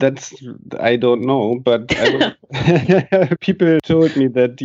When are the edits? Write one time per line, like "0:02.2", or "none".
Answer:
0:03.6